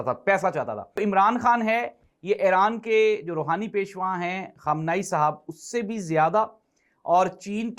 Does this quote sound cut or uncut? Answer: cut